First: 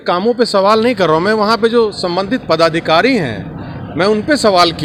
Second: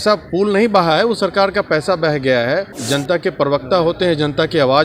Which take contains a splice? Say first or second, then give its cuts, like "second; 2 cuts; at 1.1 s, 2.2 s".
second; 1 cut; at 2.8 s